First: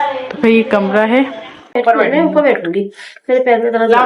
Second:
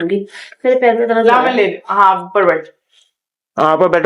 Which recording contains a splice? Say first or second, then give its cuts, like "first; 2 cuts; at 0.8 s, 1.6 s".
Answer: first; 1 cut; at 1.7 s